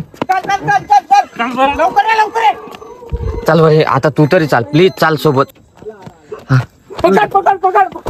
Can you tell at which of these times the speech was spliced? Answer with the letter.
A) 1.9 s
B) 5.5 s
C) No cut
B